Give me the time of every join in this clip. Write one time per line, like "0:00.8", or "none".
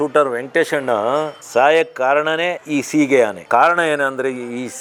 none

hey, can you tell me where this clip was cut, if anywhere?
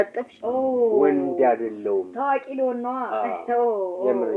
none

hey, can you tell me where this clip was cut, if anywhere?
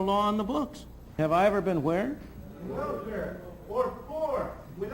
0:01.1

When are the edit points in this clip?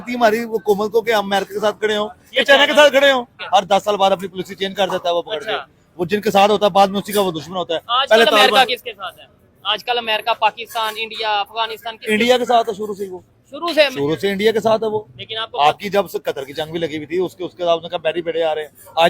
0:03.3

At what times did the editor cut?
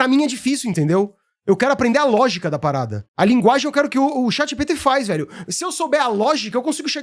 none

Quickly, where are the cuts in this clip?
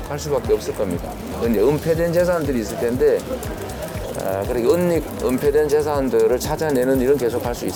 none

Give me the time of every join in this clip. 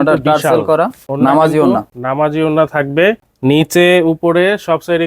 0:01.0
0:02.0
0:03.3

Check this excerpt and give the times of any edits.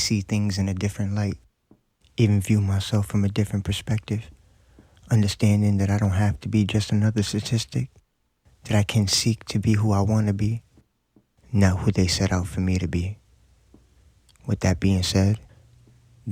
0:07.0

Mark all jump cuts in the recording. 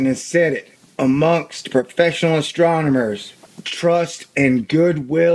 none

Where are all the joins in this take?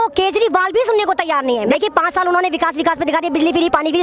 0:01.7

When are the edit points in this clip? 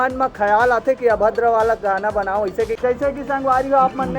0:02.7

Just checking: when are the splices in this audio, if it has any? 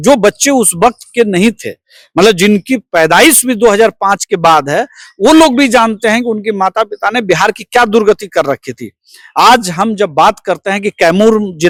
none

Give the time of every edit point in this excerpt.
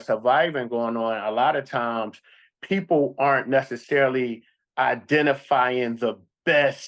none

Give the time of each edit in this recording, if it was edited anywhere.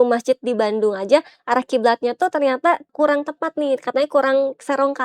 0:02.9

